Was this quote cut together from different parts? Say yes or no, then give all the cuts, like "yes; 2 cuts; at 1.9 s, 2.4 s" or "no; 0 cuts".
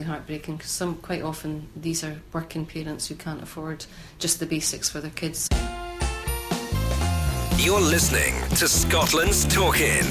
yes; 1 cut; at 5.4 s